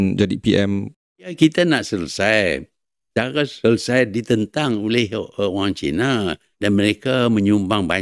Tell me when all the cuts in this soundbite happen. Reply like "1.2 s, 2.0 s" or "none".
1.3 s, 6.5 s